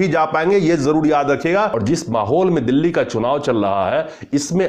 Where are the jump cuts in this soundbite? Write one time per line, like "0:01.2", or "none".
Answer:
0:01.8